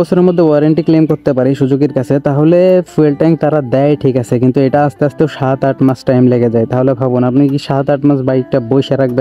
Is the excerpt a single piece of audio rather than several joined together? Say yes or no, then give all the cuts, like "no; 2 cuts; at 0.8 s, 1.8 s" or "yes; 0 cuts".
yes; 0 cuts